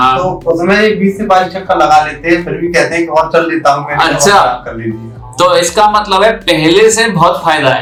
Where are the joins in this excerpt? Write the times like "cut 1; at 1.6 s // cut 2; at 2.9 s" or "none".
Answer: none

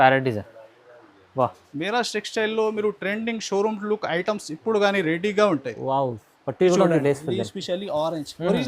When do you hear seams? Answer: cut 1; at 1.6 s

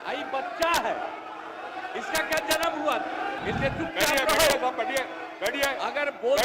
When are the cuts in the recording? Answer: cut 1; at 3.4 s

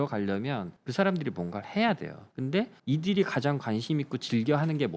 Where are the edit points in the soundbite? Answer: cut 1; at 2.2 s

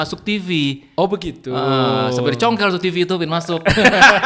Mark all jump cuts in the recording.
none

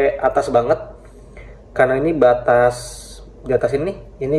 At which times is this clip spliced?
none

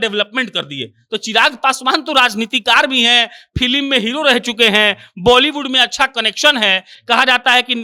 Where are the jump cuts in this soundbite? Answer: none

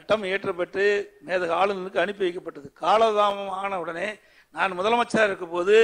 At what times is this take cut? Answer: none

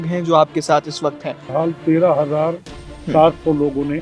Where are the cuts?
cut 1; at 1.5 s

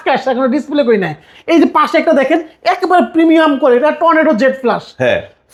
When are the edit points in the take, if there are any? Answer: none

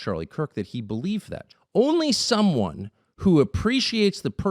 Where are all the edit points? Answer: cut 1; at 1.4 s

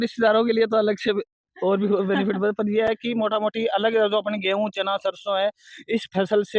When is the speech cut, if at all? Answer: none

